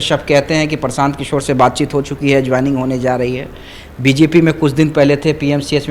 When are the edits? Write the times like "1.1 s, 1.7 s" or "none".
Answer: none